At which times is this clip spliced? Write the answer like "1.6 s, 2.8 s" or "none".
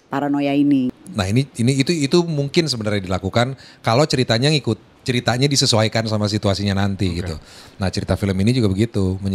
0.9 s